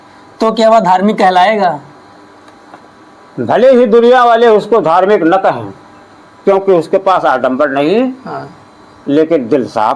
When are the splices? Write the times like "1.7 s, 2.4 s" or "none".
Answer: none